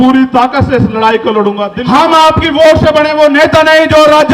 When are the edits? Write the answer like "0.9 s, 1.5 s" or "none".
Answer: 1.7 s

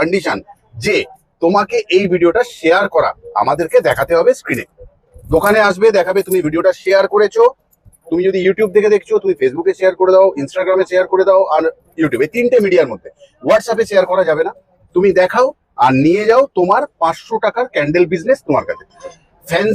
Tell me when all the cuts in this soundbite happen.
none

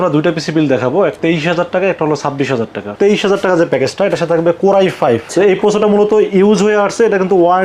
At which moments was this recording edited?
1.2 s, 2.9 s, 5.3 s

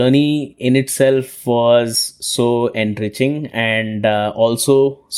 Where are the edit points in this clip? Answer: none

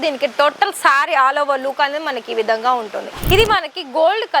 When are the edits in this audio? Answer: 3.1 s

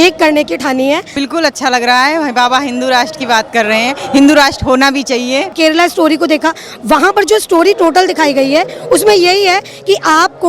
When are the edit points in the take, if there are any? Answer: 1.1 s, 5.5 s

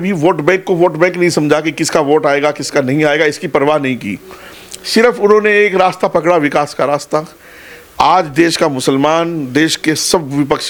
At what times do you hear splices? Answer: none

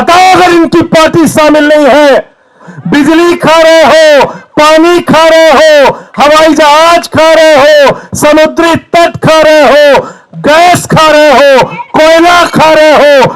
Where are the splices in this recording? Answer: 2.7 s

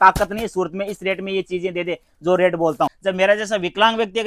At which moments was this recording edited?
3.0 s

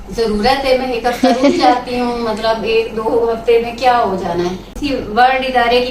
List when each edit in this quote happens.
4.7 s

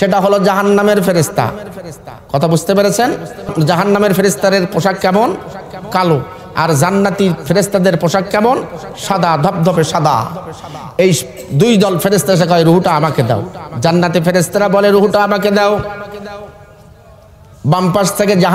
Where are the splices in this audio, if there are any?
3.5 s

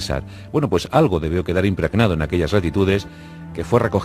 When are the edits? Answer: 2.2 s

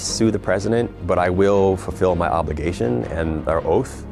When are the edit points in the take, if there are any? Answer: 1.0 s

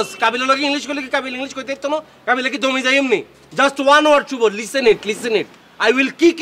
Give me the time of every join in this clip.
none

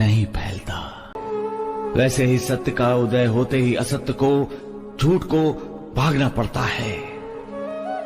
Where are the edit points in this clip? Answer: 1.2 s

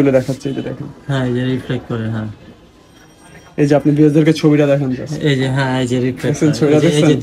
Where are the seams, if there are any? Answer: none

